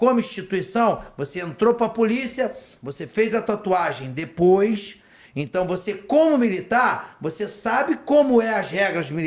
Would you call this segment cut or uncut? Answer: uncut